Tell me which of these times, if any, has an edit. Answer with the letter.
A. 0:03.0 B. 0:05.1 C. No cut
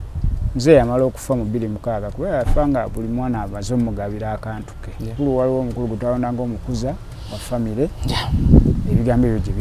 B